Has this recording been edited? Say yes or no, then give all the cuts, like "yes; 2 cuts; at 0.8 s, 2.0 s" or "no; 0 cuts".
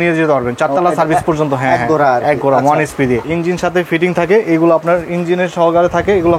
yes; 1 cut; at 3.2 s